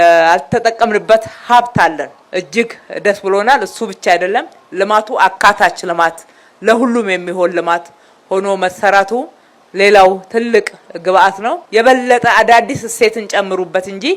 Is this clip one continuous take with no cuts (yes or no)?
no